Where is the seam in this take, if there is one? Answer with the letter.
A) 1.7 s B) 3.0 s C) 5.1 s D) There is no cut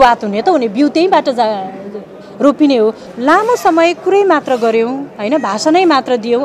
B